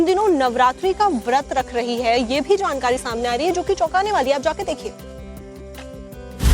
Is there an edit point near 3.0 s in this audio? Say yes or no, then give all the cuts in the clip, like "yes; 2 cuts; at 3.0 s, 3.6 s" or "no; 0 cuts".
no; 1 cut; at 5.4 s